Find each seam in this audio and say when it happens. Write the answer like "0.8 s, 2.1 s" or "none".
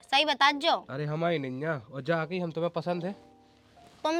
none

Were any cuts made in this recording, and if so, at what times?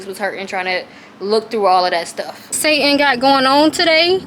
2.6 s

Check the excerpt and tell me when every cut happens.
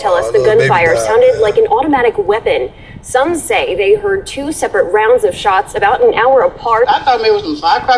6.9 s

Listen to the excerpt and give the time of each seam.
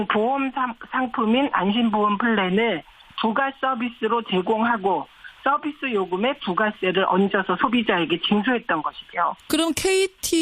9.0 s

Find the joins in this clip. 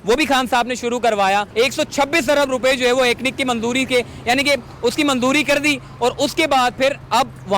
1.5 s

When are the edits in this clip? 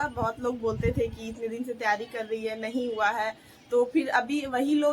none

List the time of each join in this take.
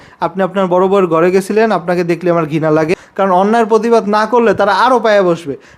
2.9 s

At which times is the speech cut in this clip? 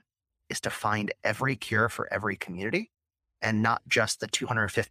none

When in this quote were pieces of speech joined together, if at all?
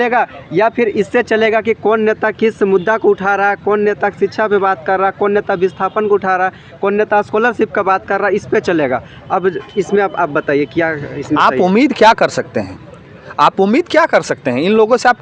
none

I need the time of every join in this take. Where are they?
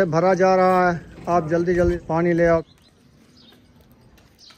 2.0 s, 2.7 s

